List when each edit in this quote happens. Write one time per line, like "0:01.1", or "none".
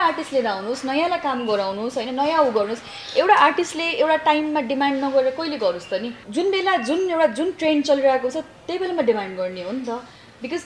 0:06.2